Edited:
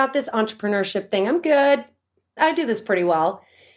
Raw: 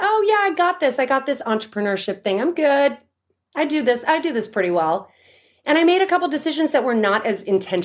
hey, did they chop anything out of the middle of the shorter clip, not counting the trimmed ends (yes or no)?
yes